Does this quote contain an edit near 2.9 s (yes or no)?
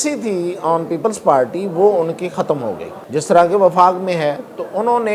yes